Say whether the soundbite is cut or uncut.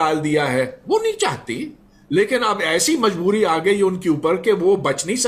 uncut